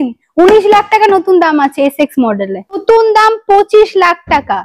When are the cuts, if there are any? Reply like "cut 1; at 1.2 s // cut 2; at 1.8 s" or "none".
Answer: cut 1; at 2.8 s